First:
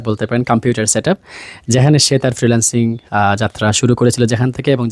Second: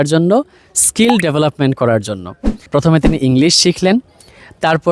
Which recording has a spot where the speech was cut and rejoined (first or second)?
second